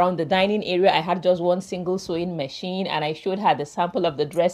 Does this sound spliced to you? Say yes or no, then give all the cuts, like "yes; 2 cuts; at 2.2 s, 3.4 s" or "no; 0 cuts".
no; 0 cuts